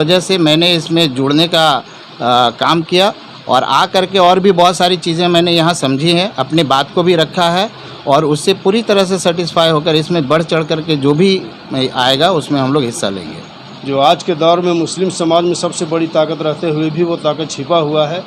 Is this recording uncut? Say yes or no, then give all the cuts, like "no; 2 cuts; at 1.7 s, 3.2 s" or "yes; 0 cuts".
yes; 0 cuts